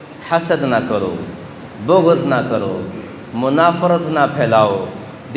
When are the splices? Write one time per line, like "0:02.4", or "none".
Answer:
none